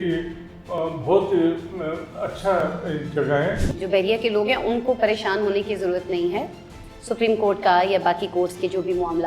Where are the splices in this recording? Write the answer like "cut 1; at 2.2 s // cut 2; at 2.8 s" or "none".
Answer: cut 1; at 3.6 s